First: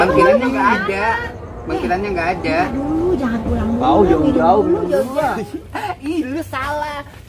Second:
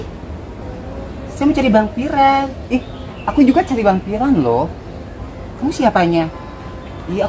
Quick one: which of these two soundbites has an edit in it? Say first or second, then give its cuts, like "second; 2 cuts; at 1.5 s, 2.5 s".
first; 1 cut; at 5.4 s